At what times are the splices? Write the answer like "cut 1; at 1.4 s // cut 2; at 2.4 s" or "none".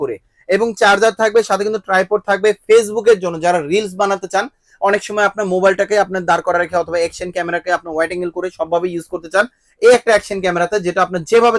none

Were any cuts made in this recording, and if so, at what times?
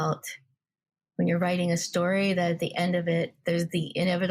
cut 1; at 3.4 s

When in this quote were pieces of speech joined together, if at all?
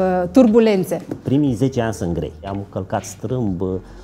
cut 1; at 2.5 s

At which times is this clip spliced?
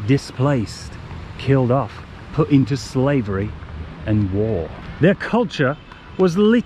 cut 1; at 4.8 s

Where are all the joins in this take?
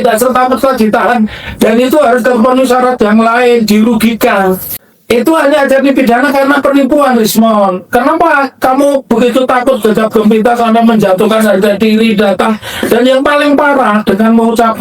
cut 1; at 4.9 s

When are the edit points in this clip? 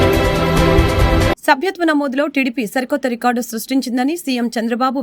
none

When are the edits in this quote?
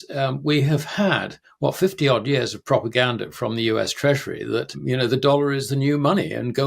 cut 1; at 4.8 s

